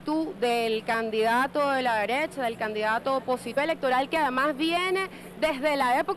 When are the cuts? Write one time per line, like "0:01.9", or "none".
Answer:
none